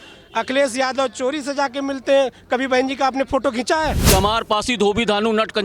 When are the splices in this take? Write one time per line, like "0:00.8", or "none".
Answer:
0:04.0